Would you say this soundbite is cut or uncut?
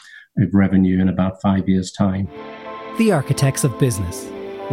cut